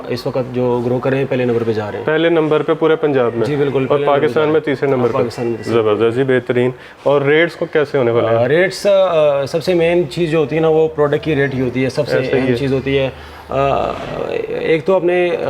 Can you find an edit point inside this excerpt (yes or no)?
no